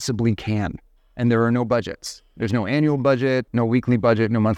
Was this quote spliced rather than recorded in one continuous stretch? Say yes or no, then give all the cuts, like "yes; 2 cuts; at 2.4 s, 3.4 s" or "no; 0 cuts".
yes; 1 cut; at 3.5 s